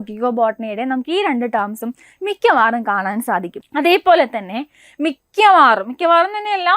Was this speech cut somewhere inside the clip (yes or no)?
yes